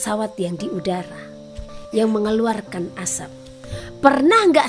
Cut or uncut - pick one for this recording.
cut